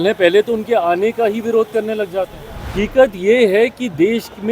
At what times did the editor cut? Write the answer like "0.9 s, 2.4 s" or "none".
2.7 s